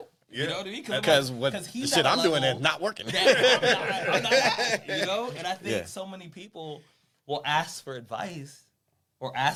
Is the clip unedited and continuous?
yes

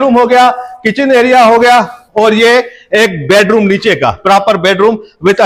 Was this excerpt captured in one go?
yes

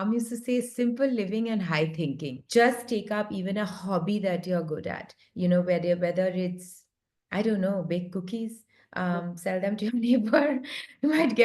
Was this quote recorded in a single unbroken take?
no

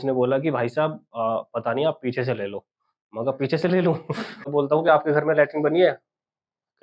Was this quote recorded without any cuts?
no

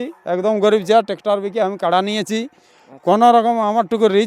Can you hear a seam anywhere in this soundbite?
no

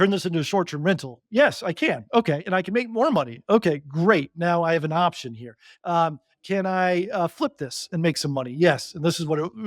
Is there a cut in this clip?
yes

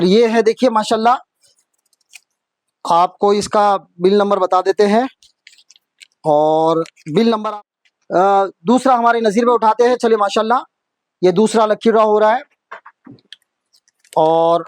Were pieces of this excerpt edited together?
yes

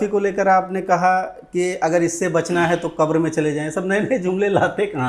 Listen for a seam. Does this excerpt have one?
no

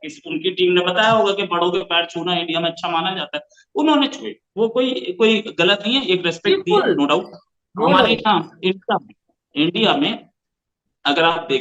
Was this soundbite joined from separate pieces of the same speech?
no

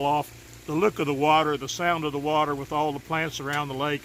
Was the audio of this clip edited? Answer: no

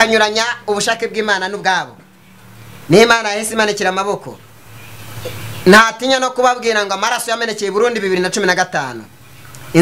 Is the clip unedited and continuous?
yes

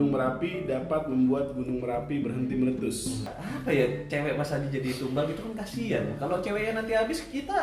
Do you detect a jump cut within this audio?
yes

